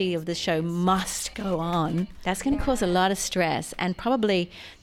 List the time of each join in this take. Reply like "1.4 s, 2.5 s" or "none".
2.2 s